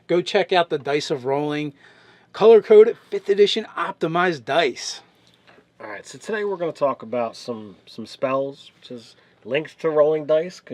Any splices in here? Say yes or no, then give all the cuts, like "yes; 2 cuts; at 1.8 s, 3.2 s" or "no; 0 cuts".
yes; 1 cut; at 2.4 s